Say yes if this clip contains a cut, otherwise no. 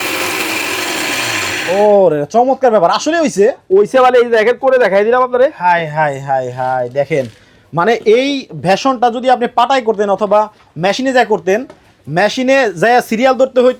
no